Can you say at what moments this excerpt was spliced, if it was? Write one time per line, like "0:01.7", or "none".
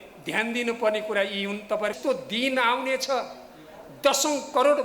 0:02.0